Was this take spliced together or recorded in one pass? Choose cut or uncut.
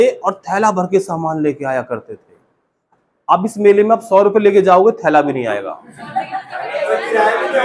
uncut